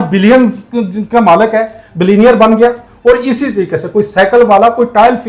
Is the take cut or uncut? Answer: uncut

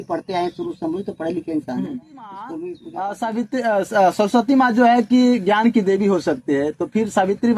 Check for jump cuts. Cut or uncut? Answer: cut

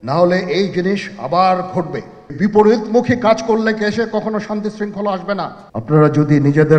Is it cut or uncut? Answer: cut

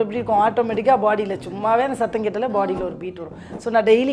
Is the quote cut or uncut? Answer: uncut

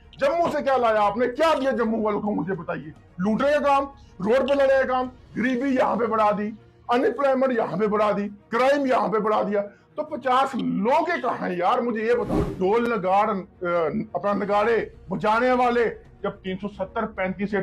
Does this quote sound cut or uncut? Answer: cut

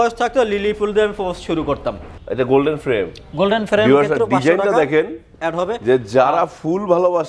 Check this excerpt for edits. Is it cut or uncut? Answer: cut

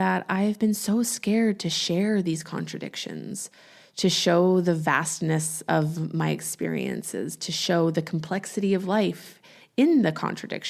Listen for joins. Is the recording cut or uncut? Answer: uncut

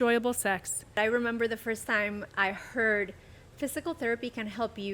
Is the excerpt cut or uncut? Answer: cut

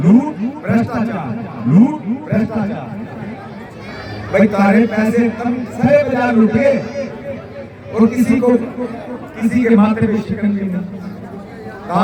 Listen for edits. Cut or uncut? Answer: uncut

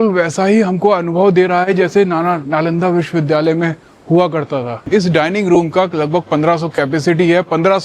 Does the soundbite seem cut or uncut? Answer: cut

